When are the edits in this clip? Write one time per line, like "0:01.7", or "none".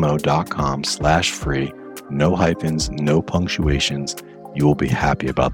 none